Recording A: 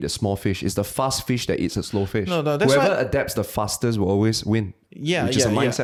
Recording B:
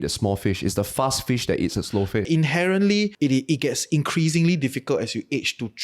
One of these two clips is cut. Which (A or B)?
B